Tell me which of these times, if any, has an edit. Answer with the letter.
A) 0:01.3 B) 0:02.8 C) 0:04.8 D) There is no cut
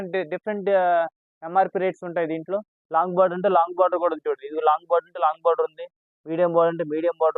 B